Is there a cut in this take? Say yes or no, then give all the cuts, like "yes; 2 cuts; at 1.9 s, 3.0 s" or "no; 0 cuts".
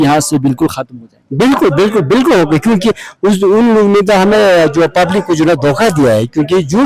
no; 0 cuts